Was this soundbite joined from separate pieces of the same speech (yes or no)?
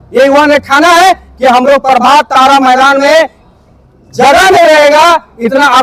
no